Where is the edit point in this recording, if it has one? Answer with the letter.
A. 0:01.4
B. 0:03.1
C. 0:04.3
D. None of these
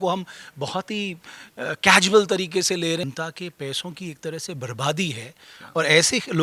B